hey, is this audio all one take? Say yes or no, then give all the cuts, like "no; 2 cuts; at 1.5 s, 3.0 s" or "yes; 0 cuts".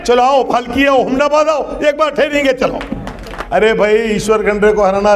no; 1 cut; at 3.3 s